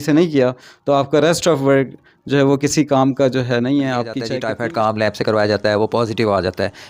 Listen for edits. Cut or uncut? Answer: cut